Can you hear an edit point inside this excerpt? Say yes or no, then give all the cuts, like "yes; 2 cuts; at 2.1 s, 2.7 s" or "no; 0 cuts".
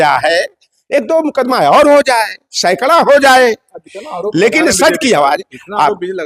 no; 0 cuts